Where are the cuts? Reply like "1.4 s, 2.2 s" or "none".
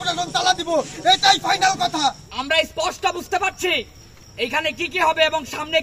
2.2 s